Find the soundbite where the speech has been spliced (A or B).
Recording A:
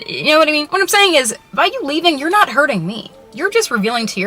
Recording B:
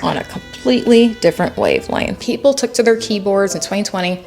B